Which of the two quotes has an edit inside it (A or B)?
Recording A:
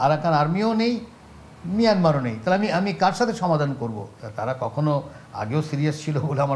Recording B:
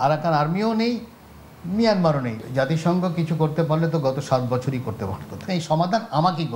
B